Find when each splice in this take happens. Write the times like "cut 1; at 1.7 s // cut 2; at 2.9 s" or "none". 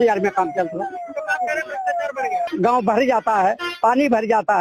cut 1; at 2.5 s